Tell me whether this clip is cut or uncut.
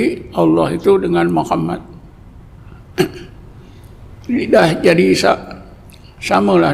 uncut